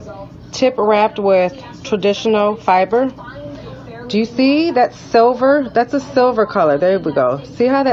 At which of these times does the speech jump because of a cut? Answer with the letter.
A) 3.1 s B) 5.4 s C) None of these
C